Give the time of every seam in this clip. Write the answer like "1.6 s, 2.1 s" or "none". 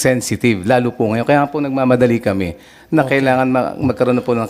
none